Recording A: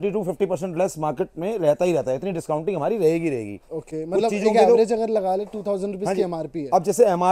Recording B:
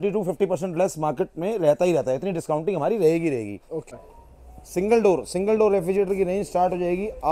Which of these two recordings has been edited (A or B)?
B